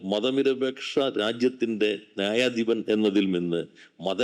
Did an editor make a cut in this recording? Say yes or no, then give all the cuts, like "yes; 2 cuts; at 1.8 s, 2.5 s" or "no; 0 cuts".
no; 0 cuts